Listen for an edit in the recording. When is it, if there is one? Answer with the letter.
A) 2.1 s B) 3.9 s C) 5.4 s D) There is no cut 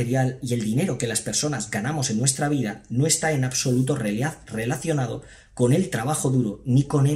D